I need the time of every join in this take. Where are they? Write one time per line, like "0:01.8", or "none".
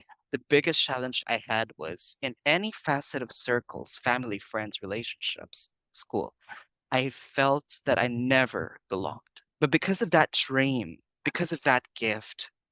0:01.2